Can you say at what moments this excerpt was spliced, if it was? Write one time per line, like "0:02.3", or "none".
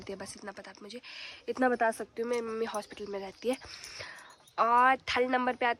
none